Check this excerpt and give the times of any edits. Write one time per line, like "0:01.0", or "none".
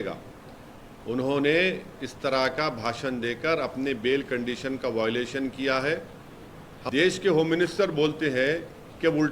0:06.7